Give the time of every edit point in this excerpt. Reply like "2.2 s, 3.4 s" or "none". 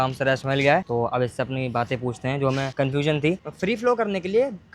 3.4 s